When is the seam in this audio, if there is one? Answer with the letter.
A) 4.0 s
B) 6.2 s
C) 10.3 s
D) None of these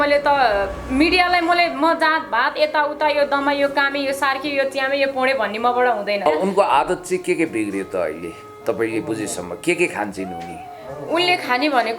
B